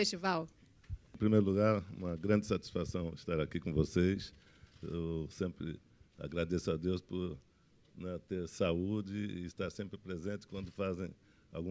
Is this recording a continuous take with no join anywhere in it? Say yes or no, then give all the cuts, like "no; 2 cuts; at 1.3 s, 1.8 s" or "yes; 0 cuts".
yes; 0 cuts